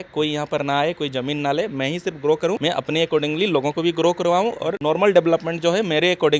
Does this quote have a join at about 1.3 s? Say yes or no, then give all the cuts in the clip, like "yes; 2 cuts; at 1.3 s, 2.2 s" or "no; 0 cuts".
no; 2 cuts; at 2.6 s, 4.7 s